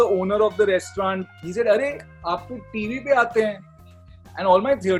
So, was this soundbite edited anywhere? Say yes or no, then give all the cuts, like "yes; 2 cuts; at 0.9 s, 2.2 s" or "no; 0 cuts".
yes; 1 cut; at 1.3 s